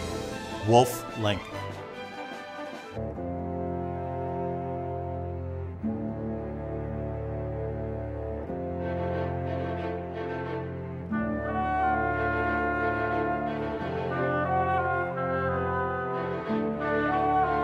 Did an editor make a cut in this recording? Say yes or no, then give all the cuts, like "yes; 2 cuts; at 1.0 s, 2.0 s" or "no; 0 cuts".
no; 0 cuts